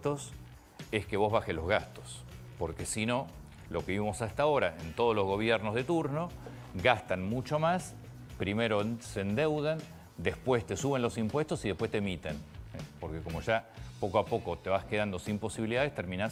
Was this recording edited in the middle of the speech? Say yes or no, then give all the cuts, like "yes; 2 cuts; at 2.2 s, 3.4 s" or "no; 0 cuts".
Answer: no; 0 cuts